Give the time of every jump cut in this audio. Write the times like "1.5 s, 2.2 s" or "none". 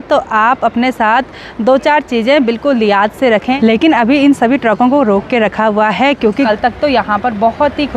3.5 s, 6.5 s